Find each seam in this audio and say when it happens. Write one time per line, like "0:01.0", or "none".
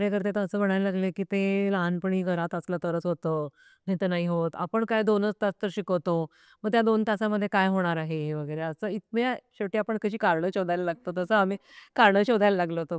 none